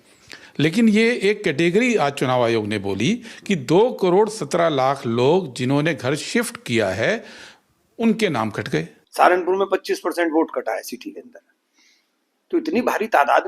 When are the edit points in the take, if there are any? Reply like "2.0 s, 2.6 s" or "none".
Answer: 9.0 s